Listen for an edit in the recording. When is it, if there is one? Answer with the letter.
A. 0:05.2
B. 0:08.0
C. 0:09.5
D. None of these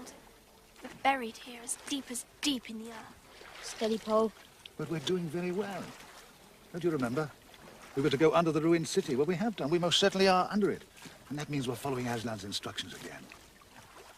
A